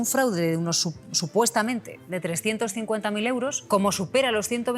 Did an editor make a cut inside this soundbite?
yes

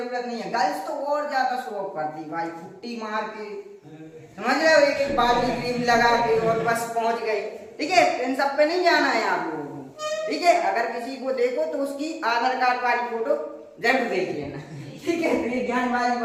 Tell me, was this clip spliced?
no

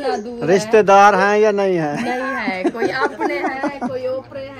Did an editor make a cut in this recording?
no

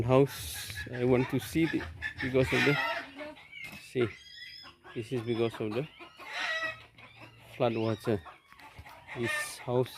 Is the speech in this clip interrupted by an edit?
no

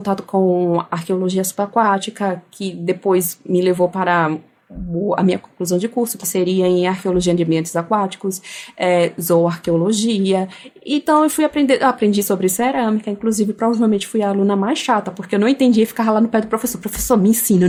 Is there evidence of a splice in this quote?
no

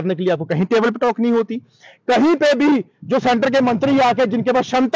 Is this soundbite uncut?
yes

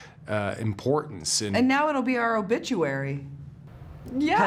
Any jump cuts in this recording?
no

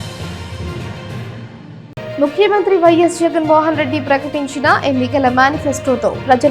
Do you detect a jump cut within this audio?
yes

